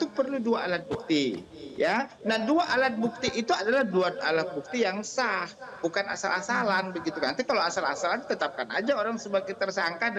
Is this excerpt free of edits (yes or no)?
yes